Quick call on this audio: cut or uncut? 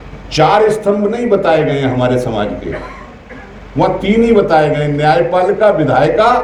uncut